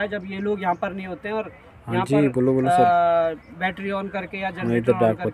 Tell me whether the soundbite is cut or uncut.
uncut